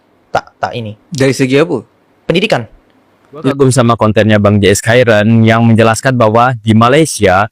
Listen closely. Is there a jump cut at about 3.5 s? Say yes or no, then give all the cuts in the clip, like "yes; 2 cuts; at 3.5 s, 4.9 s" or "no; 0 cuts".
yes; 1 cut; at 3.5 s